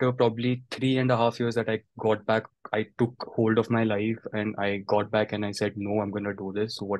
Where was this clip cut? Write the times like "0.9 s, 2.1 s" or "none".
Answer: none